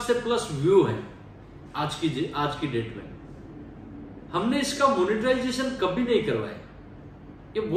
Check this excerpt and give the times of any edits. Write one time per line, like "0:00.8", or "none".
none